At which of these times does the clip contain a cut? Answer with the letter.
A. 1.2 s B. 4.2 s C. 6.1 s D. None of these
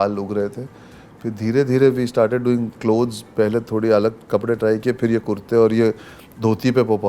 D